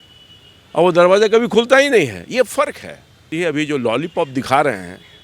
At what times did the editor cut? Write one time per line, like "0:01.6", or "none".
0:03.2